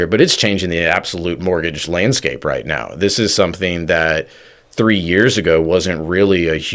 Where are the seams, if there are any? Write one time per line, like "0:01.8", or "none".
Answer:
none